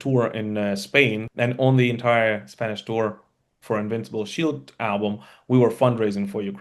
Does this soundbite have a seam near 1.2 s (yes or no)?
yes